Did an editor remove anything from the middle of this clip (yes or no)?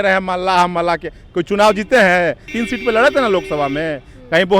yes